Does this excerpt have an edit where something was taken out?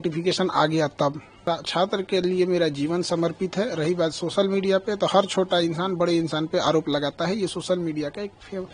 yes; 1 cut; at 1.4 s

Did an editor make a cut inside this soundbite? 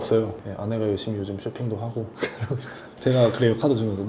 yes; 1 cut; at 2.9 s

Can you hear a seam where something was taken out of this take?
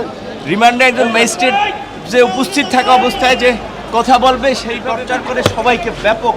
yes; 1 cut; at 4.8 s

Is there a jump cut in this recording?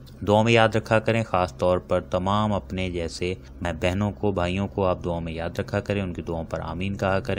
yes; 1 cut; at 3.7 s

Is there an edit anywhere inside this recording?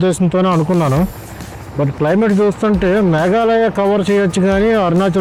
no; 0 cuts

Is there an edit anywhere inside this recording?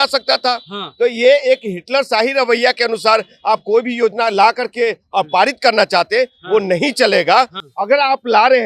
yes; 1 cut; at 7.6 s

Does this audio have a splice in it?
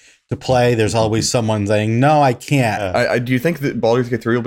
yes; 1 cut; at 2.8 s

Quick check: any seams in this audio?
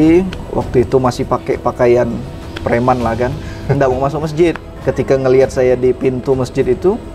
yes; 1 cut; at 4.8 s

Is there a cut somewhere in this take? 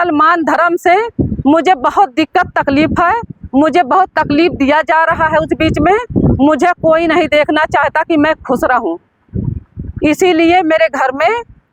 no; 0 cuts

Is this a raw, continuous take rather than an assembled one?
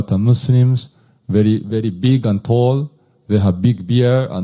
yes; 0 cuts

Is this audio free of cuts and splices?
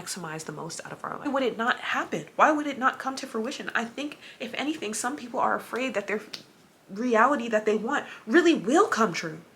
no; 1 cut; at 1.2 s

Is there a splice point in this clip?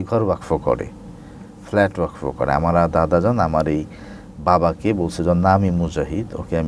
no; 0 cuts

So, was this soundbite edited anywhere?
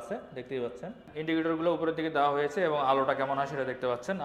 no; 0 cuts

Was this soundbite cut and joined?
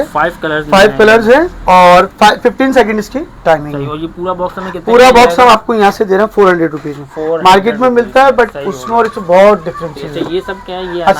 no; 0 cuts

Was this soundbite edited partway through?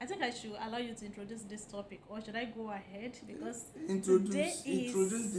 no; 0 cuts

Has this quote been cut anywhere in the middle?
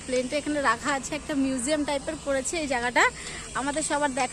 no; 0 cuts

